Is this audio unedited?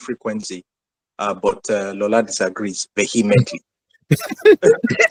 yes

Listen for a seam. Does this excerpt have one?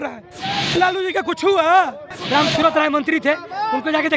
yes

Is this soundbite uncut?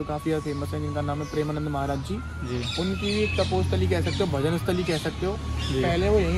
yes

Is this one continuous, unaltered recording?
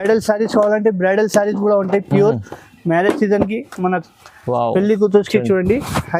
yes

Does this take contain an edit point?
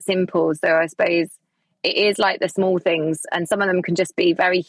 no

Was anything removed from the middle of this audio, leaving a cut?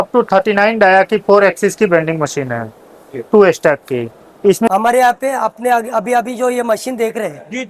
yes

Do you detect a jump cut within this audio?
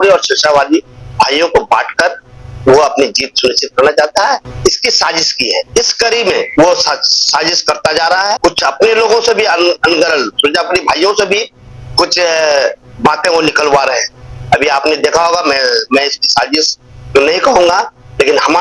no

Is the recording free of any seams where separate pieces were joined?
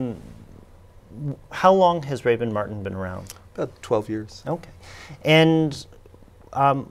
no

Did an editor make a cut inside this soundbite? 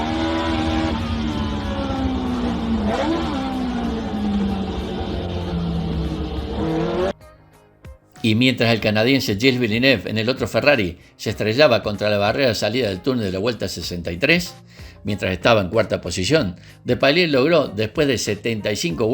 yes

